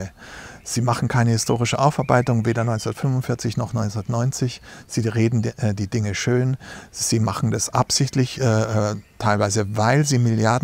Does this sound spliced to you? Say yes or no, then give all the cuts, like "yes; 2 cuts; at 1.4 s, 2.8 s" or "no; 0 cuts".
no; 0 cuts